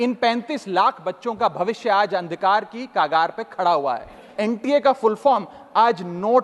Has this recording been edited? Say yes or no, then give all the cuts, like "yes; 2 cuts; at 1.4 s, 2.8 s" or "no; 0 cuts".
yes; 1 cut; at 4.3 s